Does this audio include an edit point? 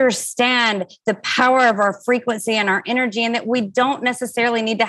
no; 0 cuts

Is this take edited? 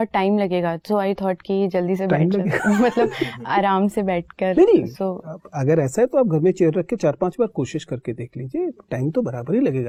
no; 0 cuts

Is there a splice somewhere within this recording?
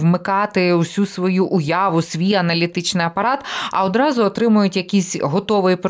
no; 0 cuts

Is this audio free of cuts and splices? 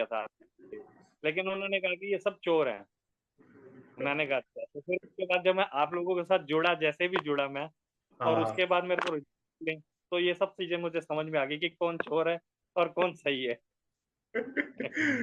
yes; 0 cuts

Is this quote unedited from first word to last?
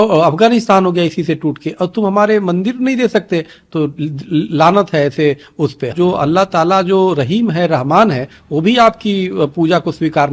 no; 1 cut; at 5.9 s

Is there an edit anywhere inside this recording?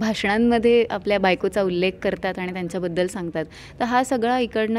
no; 0 cuts

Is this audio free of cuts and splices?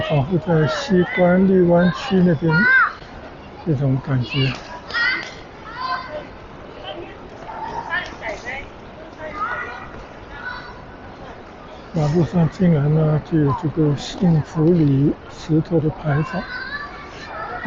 yes; 0 cuts

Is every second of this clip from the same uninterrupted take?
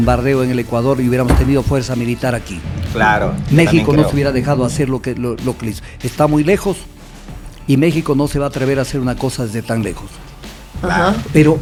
yes; 0 cuts

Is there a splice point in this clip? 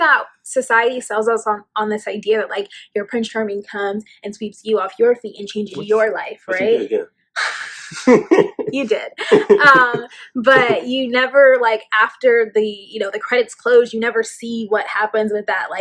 no; 0 cuts

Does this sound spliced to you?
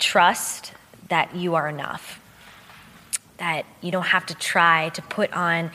no; 0 cuts

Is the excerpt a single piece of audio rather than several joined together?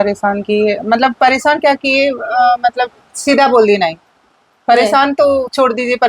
yes; 0 cuts

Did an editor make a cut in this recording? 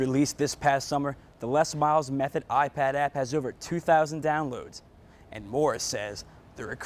no; 0 cuts

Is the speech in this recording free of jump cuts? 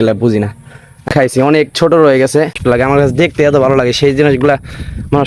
no; 2 cuts; at 1.1 s, 2.6 s

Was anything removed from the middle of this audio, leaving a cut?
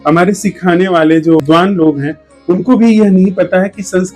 yes; 1 cut; at 1.4 s

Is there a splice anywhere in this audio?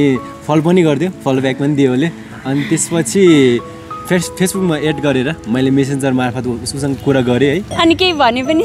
yes; 1 cut; at 7.7 s

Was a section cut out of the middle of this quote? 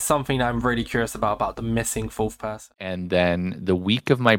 yes; 1 cut; at 2.9 s

